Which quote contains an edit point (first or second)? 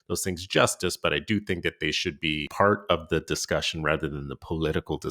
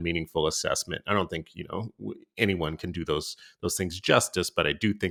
first